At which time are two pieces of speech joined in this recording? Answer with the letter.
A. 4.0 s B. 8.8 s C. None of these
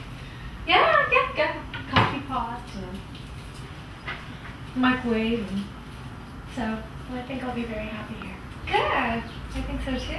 A